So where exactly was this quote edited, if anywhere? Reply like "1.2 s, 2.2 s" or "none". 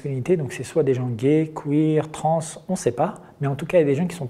none